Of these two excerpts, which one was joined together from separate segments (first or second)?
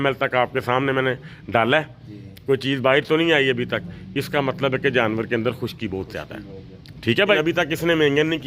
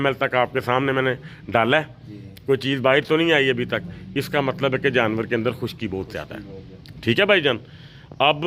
first